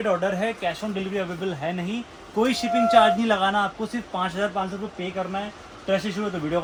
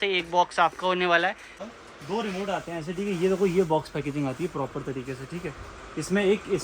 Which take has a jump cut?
second; 1 cut; at 1.5 s

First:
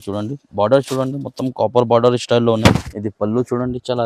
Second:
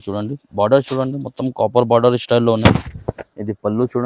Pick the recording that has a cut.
first; 1 cut; at 2.9 s

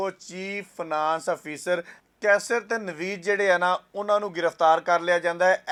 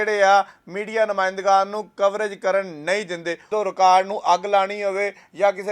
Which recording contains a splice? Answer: second; 1 cut; at 3.4 s

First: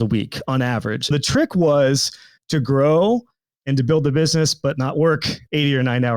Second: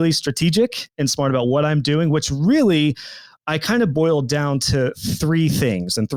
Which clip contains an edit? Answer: first; 1 cut; at 1.1 s

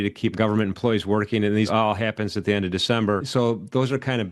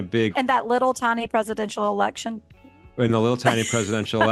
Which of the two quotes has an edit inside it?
first; 2 cuts; at 1.7 s, 3.3 s

